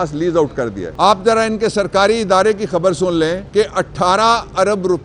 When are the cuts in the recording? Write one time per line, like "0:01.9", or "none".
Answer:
0:00.8
0:03.4